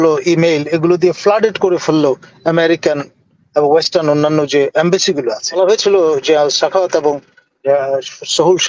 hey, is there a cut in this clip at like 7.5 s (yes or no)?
no